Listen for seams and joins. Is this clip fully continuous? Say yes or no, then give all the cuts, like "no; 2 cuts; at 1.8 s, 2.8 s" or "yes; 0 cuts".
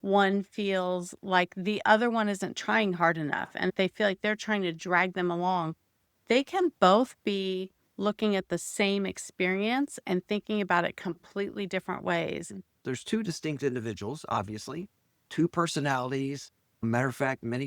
no; 1 cut; at 12.7 s